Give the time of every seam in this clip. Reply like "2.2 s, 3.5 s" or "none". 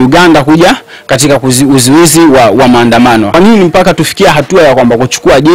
3.3 s